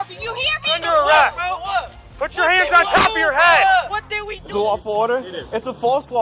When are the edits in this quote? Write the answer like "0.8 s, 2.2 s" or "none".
0.8 s, 4.3 s